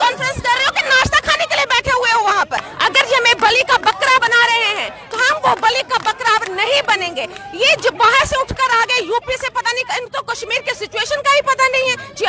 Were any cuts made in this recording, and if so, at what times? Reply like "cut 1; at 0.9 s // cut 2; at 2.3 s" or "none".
cut 1; at 2.7 s